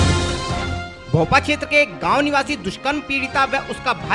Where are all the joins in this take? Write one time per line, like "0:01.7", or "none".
0:00.9